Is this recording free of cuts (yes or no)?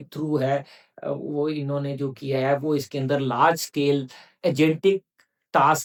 yes